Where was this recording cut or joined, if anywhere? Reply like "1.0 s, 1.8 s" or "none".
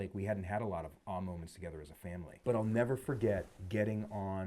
2.3 s, 3.6 s